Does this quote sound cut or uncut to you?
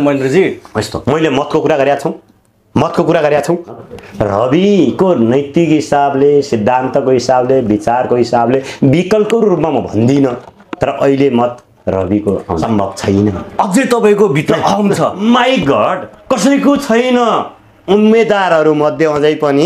cut